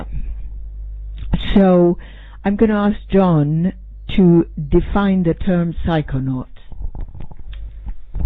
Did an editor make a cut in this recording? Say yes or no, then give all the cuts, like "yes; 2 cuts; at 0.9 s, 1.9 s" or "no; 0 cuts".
yes; 1 cut; at 3.5 s